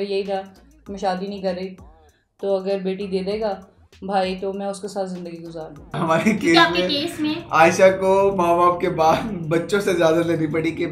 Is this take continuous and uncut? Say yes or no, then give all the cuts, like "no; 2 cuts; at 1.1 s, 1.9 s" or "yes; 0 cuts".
no; 1 cut; at 5.9 s